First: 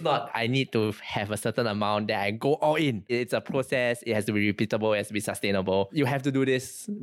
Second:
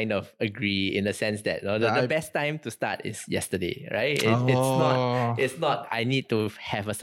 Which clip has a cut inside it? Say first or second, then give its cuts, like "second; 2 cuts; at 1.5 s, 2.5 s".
first; 1 cut; at 3.1 s